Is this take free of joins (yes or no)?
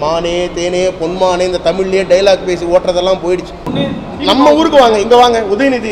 no